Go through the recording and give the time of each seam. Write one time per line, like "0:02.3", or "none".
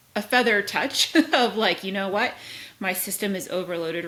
none